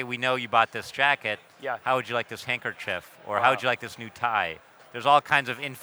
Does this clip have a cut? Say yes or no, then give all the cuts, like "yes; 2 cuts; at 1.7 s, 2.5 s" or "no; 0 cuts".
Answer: yes; 1 cut; at 4.8 s